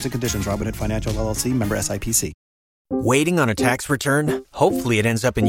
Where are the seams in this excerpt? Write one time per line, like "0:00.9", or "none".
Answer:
0:02.9